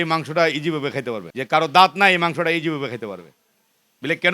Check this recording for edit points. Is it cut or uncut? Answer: cut